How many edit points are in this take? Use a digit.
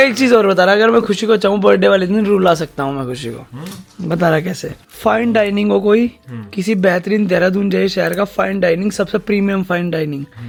0